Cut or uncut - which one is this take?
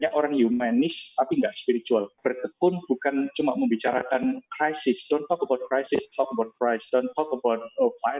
cut